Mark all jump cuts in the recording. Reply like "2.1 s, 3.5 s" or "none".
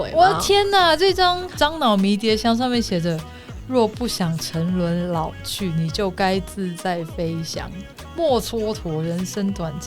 1.5 s